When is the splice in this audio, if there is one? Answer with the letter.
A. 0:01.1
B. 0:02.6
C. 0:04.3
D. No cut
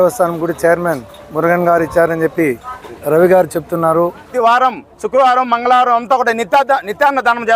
C